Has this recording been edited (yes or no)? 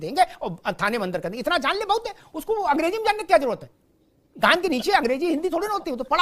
no